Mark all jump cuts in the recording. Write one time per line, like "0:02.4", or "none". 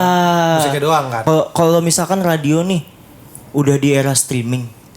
0:01.1